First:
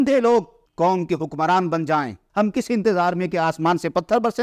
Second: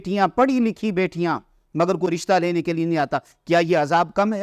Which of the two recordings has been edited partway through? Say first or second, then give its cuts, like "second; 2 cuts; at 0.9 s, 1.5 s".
first; 1 cut; at 2.2 s